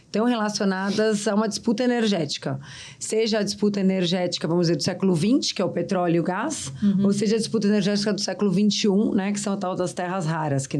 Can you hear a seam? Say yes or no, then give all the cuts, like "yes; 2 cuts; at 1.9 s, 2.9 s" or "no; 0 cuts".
no; 0 cuts